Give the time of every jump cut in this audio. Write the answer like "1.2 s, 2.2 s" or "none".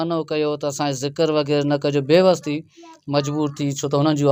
none